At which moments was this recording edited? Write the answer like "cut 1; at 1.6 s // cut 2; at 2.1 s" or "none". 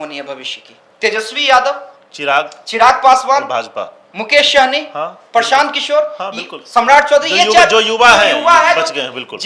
none